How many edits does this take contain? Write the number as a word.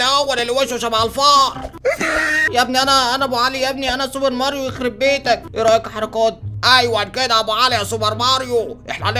one